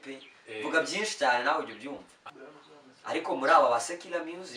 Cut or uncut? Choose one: cut